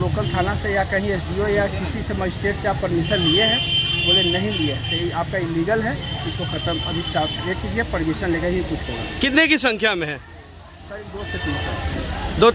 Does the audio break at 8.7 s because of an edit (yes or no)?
no